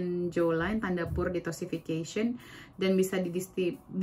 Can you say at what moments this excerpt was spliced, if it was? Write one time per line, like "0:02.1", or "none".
none